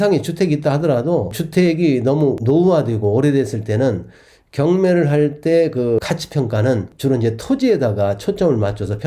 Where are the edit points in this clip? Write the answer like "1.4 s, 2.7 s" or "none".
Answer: 1.4 s, 6.9 s